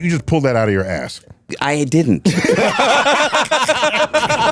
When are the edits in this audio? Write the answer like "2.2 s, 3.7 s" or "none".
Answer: 1.5 s